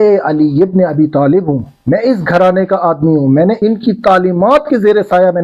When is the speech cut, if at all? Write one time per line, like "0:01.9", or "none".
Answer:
none

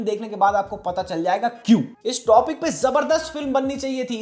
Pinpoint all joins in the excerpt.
none

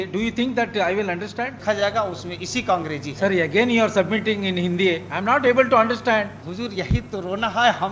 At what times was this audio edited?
0:01.6
0:06.4

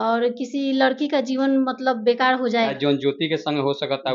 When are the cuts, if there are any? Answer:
0:02.7

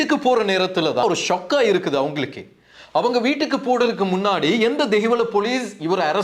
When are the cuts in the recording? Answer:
0:01.0

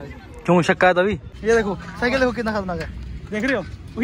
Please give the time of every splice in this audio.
0:01.3

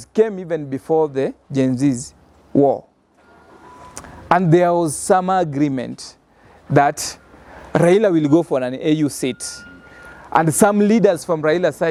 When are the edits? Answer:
none

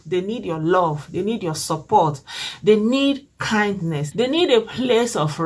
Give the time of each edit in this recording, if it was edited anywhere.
0:04.0

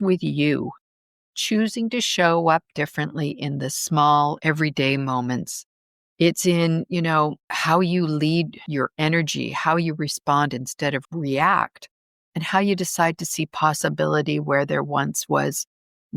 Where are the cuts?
0:07.5
0:08.6

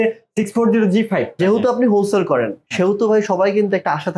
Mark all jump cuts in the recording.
0:01.4

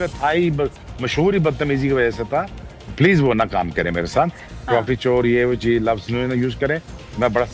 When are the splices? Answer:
0:04.4

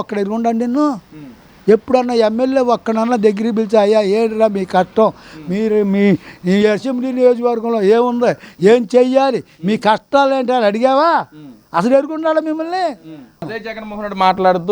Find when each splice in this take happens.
0:13.5

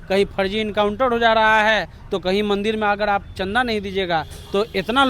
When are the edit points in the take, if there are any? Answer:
none

